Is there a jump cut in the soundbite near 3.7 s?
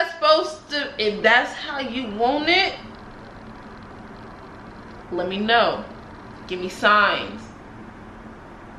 no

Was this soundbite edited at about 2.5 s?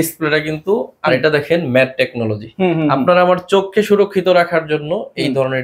no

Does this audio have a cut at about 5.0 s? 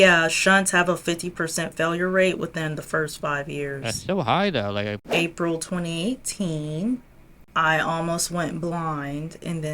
yes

